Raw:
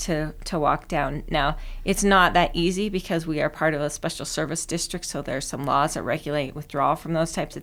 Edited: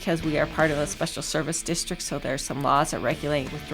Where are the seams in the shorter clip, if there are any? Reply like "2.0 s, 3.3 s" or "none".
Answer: none

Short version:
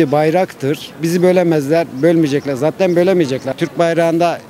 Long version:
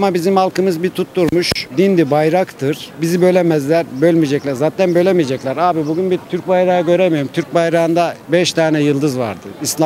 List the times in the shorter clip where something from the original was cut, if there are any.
3.5 s

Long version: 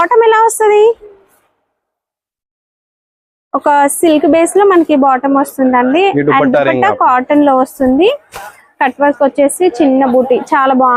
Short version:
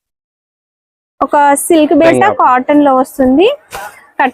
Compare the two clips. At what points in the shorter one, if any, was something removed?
2.1 s

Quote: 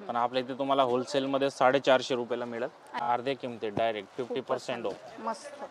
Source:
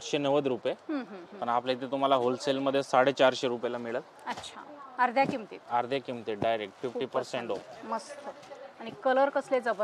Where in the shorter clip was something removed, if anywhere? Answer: 2.9 s

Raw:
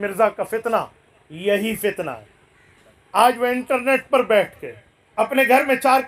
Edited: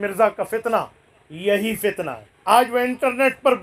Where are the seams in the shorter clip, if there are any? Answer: 2.3 s

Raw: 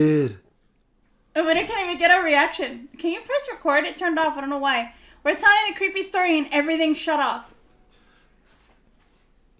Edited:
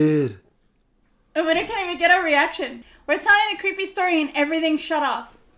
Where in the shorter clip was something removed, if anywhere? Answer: 2.9 s

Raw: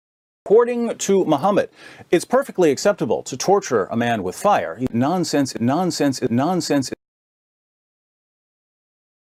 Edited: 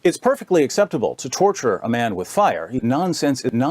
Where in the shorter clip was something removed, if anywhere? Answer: 2.8 s

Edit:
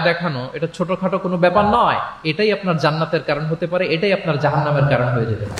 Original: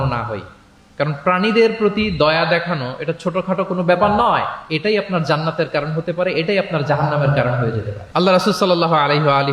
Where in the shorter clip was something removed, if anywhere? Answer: none

